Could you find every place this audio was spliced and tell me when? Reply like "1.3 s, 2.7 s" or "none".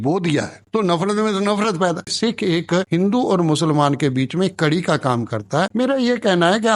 2.1 s, 5.7 s